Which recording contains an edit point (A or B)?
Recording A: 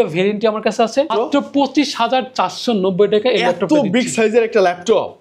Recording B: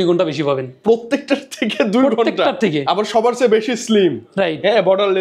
A